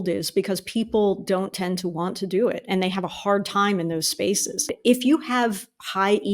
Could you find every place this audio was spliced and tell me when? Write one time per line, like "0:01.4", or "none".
0:04.7